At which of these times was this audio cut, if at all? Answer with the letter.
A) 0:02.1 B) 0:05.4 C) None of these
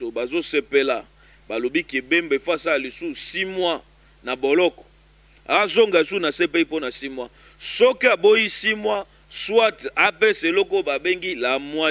C